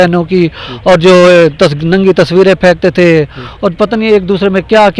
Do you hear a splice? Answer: no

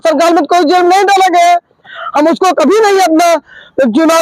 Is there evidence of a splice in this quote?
yes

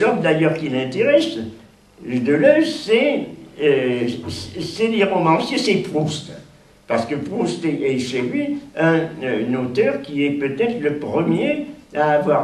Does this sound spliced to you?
yes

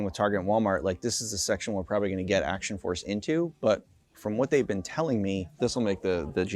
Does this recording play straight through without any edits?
no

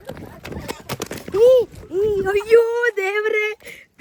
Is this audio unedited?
yes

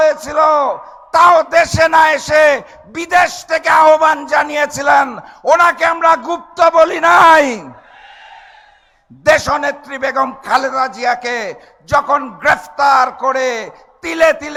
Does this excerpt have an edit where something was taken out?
no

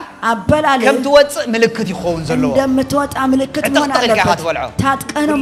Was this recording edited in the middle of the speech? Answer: no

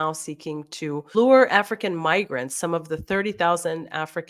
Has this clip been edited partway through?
yes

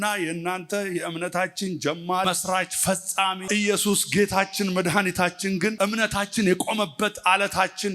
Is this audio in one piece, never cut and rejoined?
no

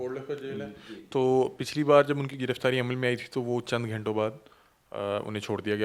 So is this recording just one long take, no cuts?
yes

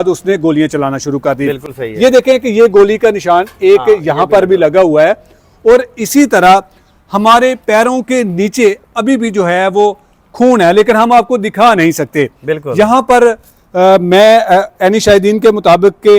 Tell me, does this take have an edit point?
no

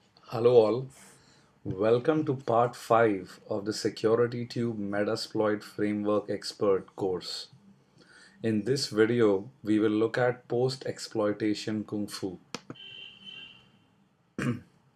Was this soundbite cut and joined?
no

